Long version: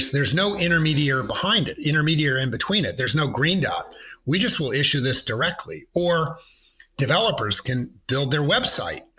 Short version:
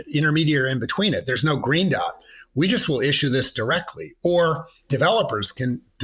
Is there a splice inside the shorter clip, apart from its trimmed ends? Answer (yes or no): yes